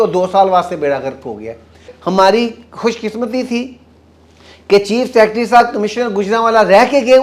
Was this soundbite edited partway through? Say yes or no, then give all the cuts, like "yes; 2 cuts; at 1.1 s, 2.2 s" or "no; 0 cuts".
yes; 1 cut; at 1.9 s